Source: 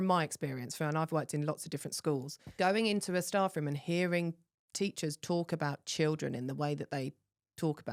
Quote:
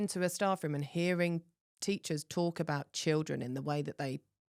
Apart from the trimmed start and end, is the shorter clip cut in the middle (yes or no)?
no